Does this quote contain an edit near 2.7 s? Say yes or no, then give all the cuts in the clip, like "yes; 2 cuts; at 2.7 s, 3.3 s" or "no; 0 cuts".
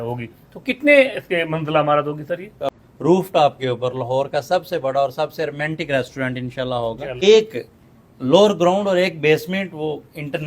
yes; 2 cuts; at 2.7 s, 7.1 s